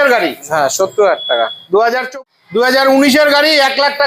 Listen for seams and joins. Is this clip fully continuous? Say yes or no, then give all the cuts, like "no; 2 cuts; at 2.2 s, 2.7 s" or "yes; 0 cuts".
no; 1 cut; at 2.1 s